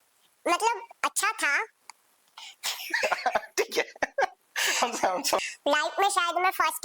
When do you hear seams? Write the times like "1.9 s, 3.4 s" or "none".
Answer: 5.4 s